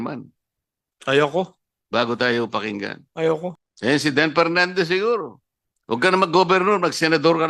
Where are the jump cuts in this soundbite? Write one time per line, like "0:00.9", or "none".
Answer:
0:03.7